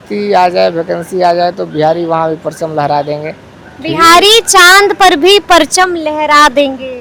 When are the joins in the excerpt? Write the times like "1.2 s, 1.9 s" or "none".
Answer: none